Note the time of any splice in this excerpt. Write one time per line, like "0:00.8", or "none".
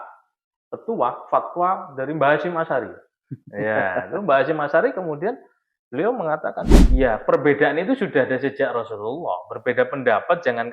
0:06.7